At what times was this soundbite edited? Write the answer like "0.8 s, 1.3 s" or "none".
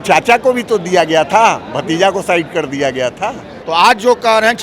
3.6 s